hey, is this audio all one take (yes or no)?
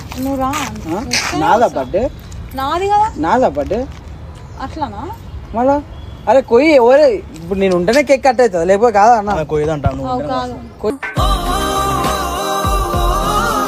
yes